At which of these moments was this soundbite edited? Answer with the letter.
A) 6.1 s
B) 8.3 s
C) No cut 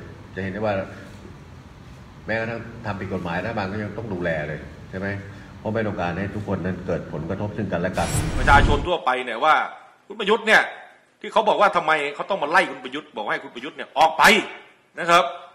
B